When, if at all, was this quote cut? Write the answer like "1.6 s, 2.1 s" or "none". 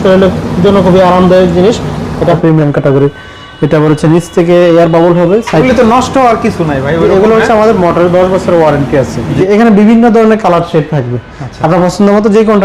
2.4 s, 5.6 s, 9.4 s